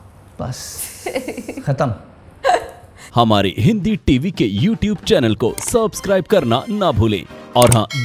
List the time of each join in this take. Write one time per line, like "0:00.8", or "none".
0:03.0

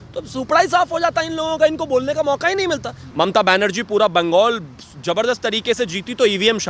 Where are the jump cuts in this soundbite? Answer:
0:03.0

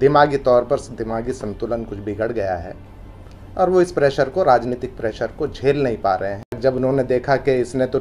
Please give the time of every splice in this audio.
0:06.6

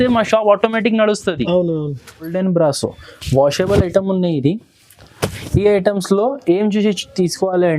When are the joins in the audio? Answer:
0:02.3

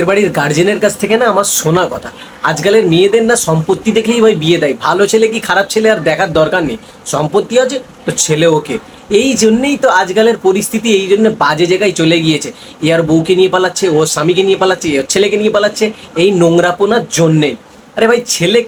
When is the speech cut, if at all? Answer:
none

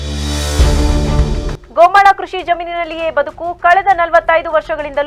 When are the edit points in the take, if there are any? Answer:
none

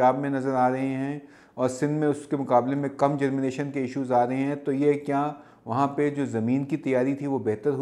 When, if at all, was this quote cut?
none

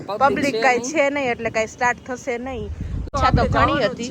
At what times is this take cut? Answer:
0:03.1

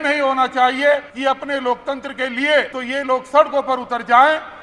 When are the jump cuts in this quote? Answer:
0:01.1
0:02.8

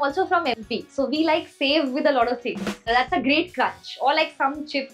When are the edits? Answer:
0:02.9

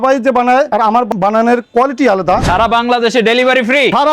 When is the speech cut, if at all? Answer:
0:02.4

